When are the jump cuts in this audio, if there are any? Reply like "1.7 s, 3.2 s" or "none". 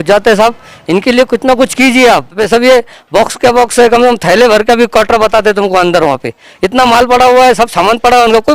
2.4 s

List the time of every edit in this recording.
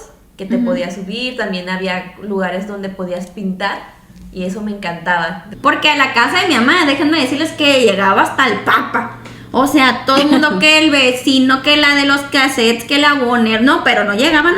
5.4 s

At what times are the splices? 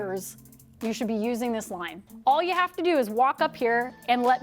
2.1 s

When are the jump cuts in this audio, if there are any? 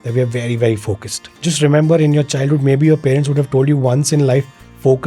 1.2 s

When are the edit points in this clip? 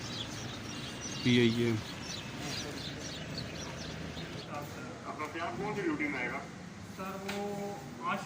4.4 s

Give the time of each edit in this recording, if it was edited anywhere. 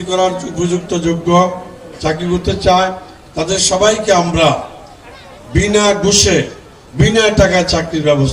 none

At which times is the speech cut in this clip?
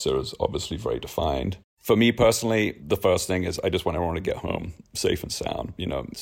1.7 s, 2.8 s

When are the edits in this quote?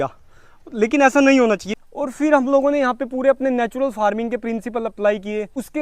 1.7 s

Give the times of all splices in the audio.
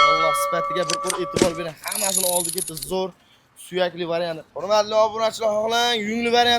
4.5 s

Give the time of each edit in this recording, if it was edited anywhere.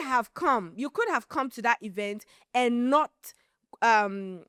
none

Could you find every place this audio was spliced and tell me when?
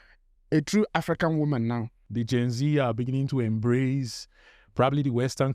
2.1 s

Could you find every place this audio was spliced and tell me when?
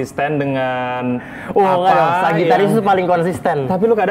none

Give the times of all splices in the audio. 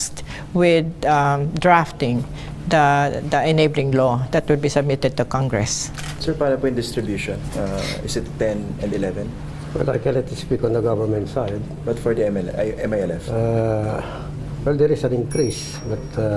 none

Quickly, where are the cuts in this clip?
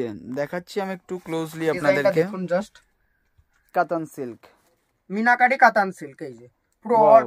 3.7 s

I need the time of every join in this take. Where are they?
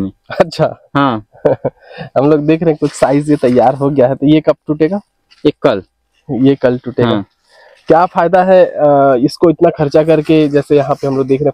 none

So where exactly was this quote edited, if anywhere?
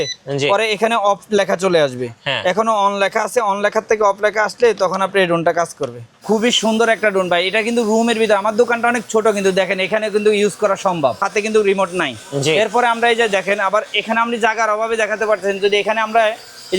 6.2 s, 11.3 s

